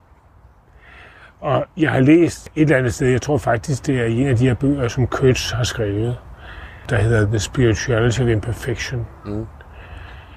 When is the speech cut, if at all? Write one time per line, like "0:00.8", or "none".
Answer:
0:02.4
0:06.8